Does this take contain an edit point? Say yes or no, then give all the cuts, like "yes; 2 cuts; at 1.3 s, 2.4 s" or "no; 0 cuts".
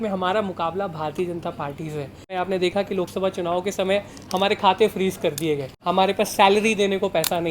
yes; 2 cuts; at 2.3 s, 5.7 s